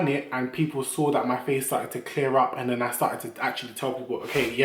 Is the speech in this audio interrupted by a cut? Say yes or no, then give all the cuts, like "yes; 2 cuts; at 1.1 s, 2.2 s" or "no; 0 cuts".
no; 0 cuts